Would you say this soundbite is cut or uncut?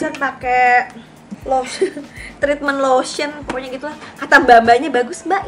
uncut